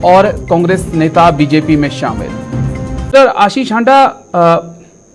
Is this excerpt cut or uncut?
cut